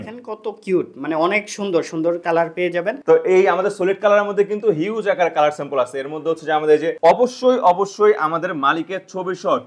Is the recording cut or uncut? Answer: cut